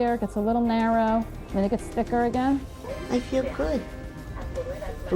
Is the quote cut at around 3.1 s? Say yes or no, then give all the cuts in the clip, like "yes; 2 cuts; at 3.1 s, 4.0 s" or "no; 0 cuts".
yes; 1 cut; at 3.1 s